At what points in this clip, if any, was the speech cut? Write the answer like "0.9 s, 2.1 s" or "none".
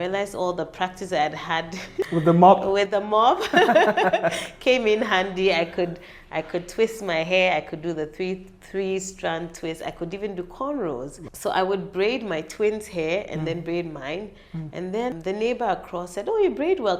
2.0 s, 11.2 s, 15.1 s